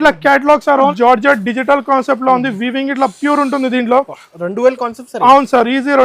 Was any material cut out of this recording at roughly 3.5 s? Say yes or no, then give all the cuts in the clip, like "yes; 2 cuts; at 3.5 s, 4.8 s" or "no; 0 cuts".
no; 1 cut; at 0.9 s